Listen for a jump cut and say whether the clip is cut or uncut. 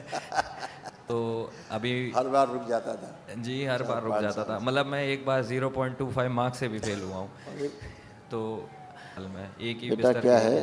cut